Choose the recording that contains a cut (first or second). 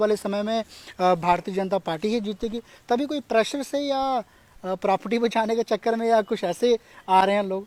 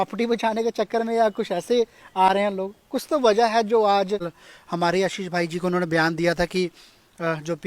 second